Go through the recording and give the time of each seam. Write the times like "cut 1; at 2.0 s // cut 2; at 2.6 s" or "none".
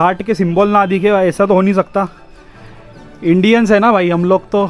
none